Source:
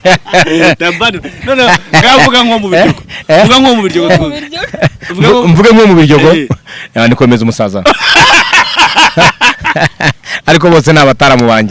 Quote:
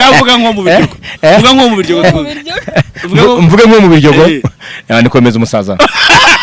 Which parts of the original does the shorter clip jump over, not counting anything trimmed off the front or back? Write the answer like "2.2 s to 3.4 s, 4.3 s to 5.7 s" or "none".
none